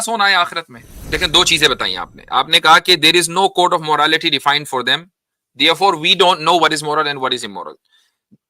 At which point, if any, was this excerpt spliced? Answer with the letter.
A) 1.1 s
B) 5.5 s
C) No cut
A